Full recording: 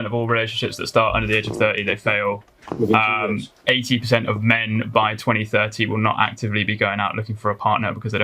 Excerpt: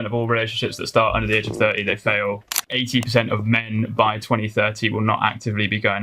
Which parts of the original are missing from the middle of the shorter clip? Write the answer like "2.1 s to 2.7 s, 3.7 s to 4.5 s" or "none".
2.6 s to 3.6 s